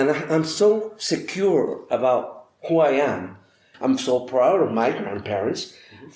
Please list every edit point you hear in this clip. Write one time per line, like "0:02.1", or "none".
0:03.7